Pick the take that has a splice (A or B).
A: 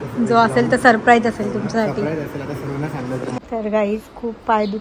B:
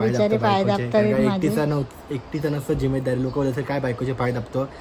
A